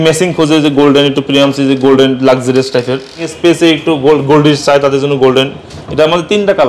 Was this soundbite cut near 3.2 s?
yes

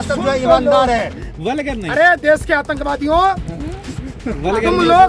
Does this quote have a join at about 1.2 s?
yes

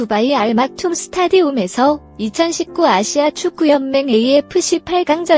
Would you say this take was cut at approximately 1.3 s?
no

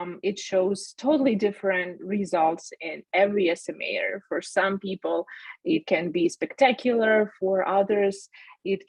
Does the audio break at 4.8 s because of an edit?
no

